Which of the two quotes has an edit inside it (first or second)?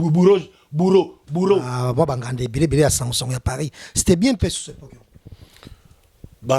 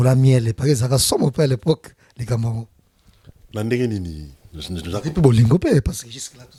first